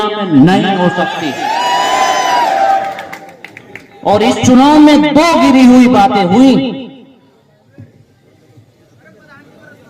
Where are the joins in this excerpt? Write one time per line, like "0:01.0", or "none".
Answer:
none